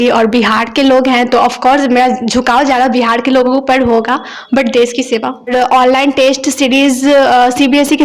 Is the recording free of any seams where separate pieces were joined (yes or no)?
no